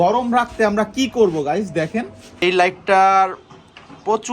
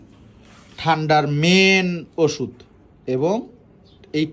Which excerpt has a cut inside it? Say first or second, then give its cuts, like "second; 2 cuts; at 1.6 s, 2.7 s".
first; 1 cut; at 2.2 s